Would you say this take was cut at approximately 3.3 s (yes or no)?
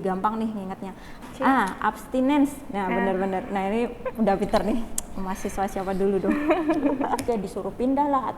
no